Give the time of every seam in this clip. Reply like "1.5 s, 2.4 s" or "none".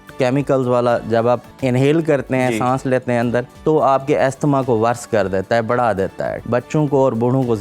1.5 s, 3.5 s, 6.4 s

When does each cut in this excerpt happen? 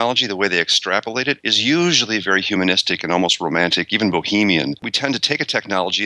1.5 s, 4.9 s

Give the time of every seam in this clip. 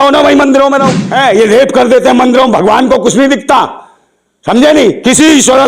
1.0 s

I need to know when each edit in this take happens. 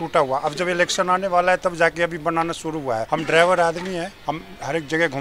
3.1 s, 4.1 s

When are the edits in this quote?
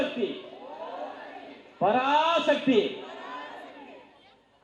none

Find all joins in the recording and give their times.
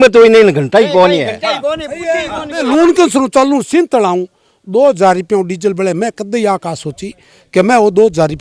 2.7 s

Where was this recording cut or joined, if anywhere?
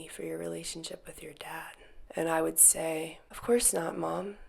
3.2 s

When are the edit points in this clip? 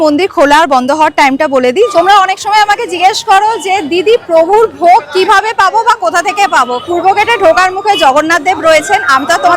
1.9 s, 6.8 s

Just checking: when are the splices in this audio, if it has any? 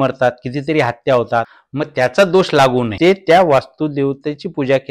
1.6 s, 2.9 s

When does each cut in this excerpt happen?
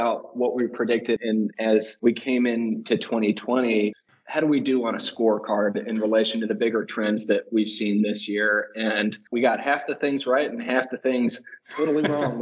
none

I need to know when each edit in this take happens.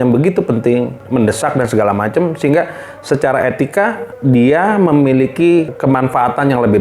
1.0 s, 4.1 s, 5.7 s

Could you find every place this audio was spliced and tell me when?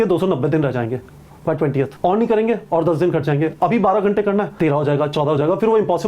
1.9 s, 4.5 s

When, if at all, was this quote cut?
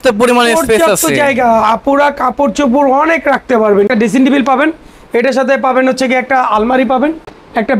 3.9 s

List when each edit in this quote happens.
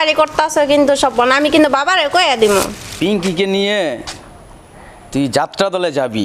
2.8 s

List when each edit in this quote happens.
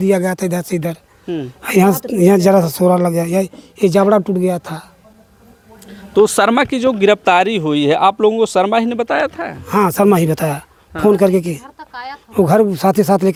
none

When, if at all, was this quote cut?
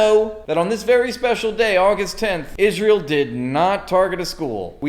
2.4 s

